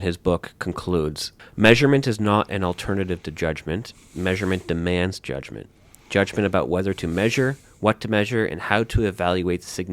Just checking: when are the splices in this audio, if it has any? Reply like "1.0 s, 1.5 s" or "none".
1.3 s